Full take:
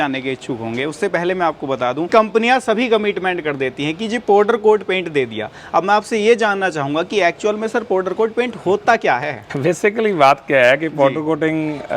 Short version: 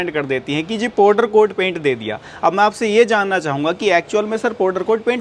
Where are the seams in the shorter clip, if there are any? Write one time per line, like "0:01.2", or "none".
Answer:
none